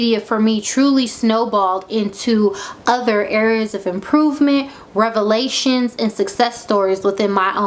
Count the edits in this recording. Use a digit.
0